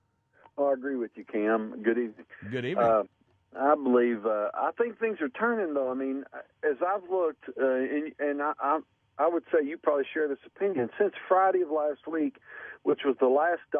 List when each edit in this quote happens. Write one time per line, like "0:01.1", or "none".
0:07.7

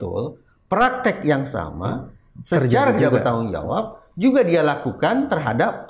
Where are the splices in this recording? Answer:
none

